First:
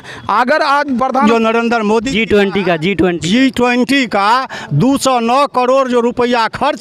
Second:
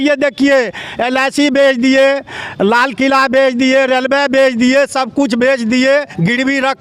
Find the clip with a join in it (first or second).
first